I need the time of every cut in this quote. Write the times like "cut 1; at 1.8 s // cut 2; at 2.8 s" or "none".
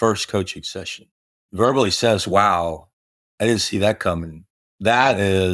cut 1; at 1.5 s